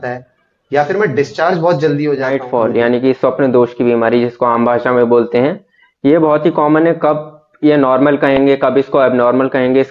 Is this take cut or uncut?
cut